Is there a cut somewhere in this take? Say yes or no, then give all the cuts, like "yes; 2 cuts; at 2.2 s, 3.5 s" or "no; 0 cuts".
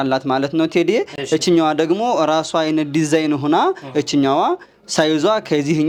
no; 0 cuts